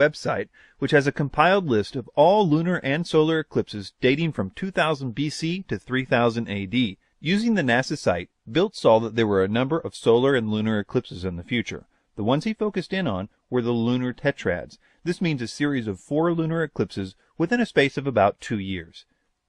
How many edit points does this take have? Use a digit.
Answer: 1